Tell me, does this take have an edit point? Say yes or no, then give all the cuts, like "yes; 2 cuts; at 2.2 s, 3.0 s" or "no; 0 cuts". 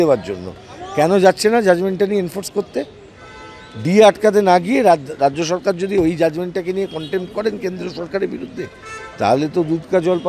no; 0 cuts